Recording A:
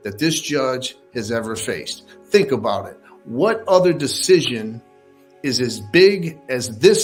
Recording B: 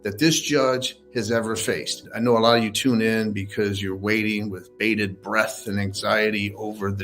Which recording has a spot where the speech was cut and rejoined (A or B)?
B